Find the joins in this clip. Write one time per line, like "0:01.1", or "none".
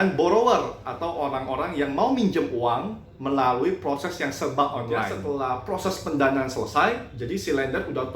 0:05.2